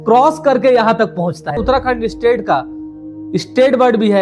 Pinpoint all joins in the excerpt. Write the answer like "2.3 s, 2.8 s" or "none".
1.6 s